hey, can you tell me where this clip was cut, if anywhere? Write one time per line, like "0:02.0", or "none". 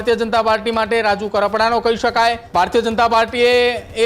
0:02.4